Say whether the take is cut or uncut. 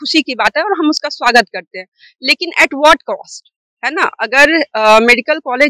uncut